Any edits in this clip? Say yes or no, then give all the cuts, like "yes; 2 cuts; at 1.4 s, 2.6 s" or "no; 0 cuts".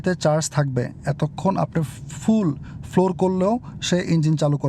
no; 0 cuts